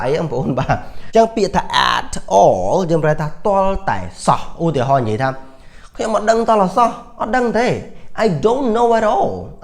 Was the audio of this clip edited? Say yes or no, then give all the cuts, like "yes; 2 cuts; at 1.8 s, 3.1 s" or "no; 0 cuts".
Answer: yes; 1 cut; at 0.9 s